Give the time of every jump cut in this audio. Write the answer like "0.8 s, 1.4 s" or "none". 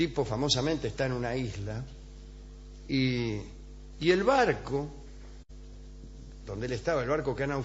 4.1 s